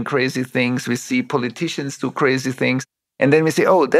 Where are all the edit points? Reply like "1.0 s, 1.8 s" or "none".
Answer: 3.0 s